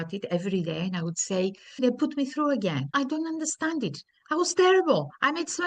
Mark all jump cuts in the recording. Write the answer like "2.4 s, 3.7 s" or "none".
1.8 s, 2.9 s